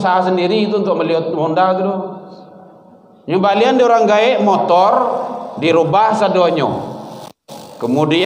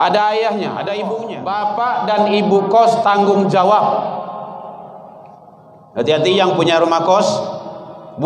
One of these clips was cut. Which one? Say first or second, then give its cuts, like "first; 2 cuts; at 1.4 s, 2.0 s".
second; 1 cut; at 1.3 s